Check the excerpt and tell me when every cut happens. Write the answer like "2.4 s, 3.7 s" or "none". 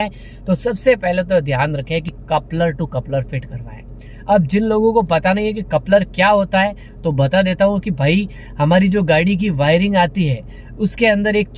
none